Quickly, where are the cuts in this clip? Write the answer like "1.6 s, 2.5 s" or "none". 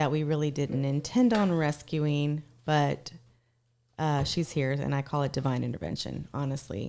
none